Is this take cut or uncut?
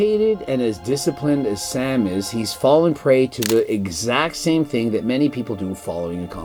uncut